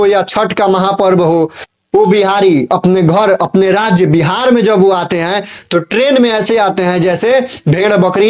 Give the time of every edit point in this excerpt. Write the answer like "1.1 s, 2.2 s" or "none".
1.7 s